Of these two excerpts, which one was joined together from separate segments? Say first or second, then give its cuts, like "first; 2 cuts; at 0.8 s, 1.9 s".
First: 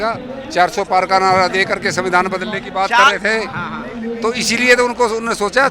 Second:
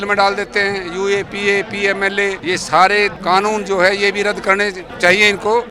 second; 3 cuts; at 2.4 s, 3.2 s, 4.9 s